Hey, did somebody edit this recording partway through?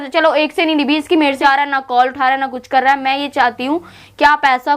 yes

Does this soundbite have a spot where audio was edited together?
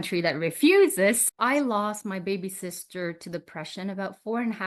yes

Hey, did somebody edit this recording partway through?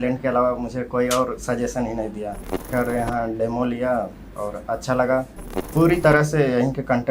yes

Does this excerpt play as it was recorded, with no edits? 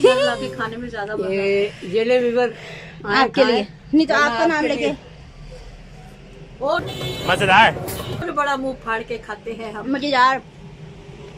yes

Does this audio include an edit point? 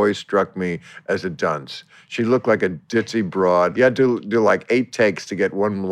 yes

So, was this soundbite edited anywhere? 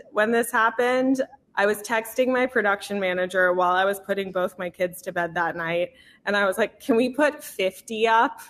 no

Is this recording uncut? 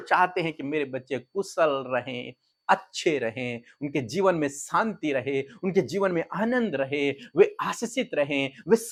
yes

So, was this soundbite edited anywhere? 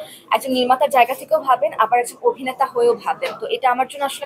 no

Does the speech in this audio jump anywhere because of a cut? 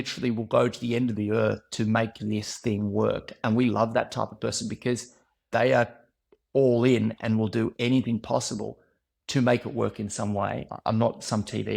yes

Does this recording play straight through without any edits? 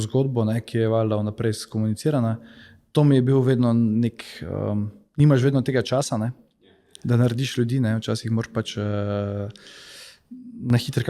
yes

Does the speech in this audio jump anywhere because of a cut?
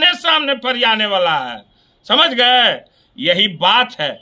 no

